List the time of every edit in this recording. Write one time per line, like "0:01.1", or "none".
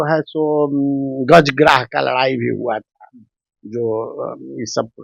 none